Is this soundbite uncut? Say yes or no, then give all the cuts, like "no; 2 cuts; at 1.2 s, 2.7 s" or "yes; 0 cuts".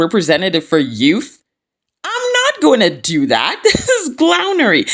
yes; 0 cuts